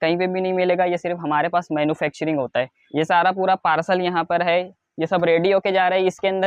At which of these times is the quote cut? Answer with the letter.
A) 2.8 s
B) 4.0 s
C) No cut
A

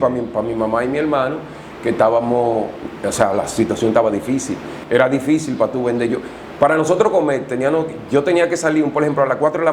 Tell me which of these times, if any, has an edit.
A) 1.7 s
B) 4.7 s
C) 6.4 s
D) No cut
B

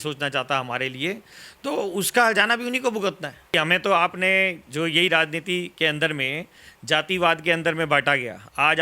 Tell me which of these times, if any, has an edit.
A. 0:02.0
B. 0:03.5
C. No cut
B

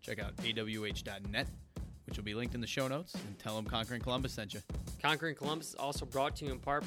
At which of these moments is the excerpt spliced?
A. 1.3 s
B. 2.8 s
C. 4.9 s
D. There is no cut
C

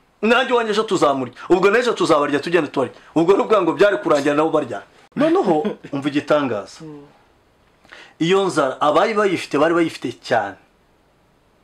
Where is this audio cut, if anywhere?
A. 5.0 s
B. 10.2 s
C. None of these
A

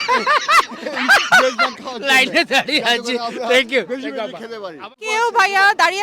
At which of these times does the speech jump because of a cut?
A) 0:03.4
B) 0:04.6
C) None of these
C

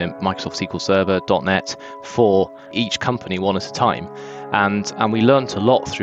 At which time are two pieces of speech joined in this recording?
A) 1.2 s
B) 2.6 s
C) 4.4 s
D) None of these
B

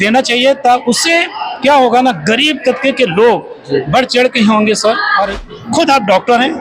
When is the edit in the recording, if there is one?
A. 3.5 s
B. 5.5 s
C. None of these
B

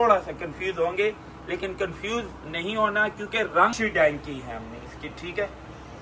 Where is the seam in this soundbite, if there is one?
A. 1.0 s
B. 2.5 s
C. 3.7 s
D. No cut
C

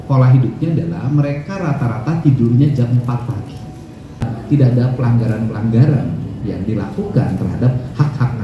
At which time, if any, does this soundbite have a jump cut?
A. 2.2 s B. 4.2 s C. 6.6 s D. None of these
B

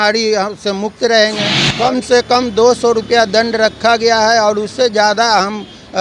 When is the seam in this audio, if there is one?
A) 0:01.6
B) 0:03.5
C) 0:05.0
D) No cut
A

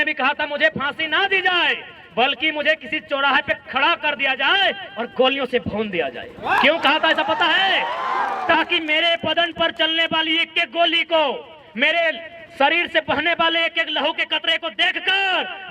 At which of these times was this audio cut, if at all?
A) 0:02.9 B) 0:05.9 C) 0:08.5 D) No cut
D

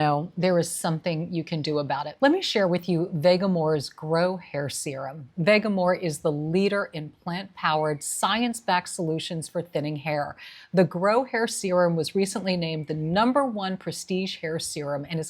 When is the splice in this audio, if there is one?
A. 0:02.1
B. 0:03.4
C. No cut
A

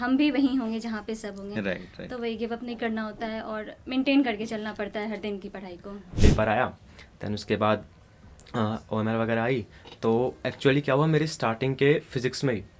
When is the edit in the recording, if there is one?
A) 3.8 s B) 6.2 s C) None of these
B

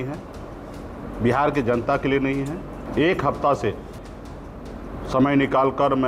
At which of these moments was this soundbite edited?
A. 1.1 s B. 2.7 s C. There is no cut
B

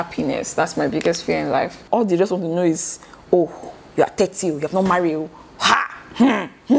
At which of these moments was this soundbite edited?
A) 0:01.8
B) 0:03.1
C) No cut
A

